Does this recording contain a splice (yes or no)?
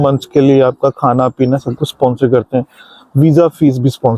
no